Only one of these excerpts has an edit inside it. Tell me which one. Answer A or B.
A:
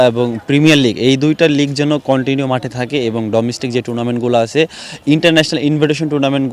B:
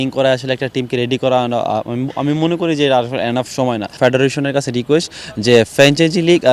B